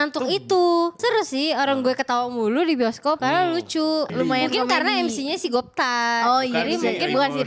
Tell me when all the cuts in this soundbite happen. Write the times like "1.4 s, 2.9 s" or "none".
1.0 s, 3.2 s, 4.1 s